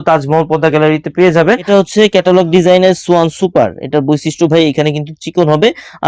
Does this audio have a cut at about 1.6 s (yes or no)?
yes